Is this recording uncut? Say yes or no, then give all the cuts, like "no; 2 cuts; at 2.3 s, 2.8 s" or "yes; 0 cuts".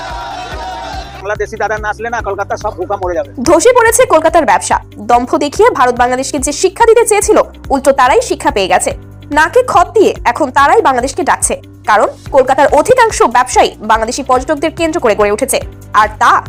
yes; 0 cuts